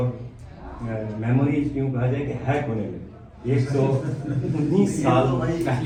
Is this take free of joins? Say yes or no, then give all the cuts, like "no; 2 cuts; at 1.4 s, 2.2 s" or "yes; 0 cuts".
yes; 0 cuts